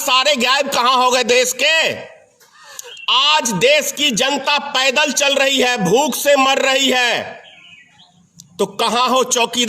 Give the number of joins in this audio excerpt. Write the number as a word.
zero